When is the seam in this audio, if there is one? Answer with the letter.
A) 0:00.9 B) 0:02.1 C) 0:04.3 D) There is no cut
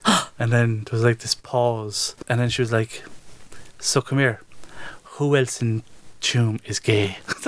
B